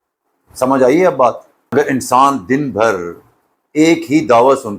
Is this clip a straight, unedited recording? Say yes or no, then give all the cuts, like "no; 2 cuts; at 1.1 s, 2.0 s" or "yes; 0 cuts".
no; 1 cut; at 1.5 s